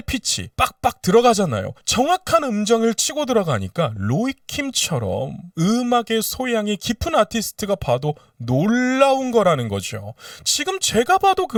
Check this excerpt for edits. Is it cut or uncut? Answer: uncut